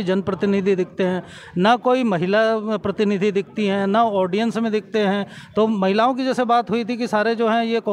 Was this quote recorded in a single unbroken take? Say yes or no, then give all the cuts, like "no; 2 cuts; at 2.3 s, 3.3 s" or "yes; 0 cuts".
yes; 0 cuts